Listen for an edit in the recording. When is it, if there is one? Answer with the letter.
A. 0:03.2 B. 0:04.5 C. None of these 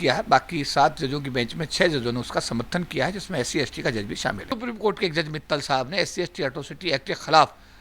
B